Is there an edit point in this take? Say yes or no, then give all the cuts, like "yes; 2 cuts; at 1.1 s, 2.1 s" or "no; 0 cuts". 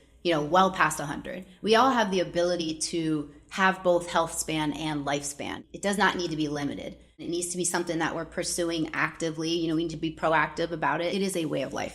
yes; 3 cuts; at 5.6 s, 7.2 s, 11.1 s